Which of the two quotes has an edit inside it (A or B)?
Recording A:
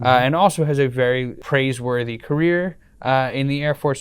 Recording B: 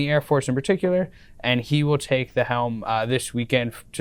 A